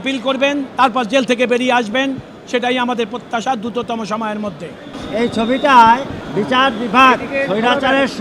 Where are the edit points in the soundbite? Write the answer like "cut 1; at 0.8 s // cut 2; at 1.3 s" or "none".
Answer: cut 1; at 4.9 s // cut 2; at 6.2 s